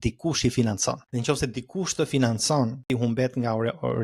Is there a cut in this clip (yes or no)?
yes